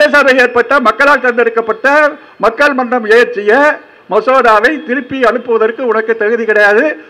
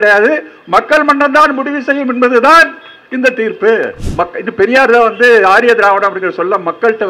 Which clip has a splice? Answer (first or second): second